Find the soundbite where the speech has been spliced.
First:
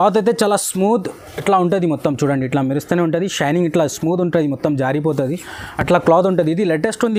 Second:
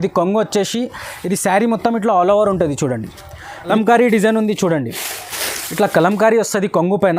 second; 1 cut; at 3.7 s

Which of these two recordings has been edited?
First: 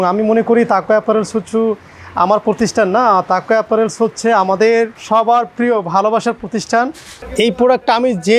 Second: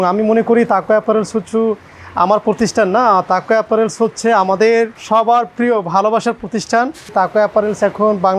first; 1 cut; at 7.1 s

